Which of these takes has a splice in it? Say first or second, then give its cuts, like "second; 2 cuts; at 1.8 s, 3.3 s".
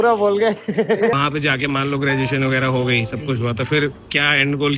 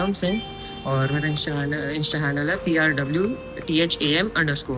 first; 1 cut; at 1.2 s